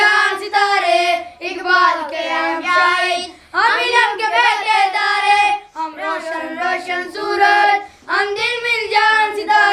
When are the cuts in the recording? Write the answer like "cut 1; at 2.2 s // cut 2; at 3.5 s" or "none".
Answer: none